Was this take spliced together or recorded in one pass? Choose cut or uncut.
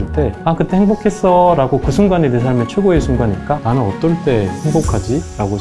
cut